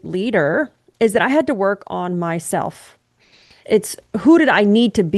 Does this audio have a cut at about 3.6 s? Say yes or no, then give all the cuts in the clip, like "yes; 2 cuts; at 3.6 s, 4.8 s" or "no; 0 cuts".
yes; 1 cut; at 3.6 s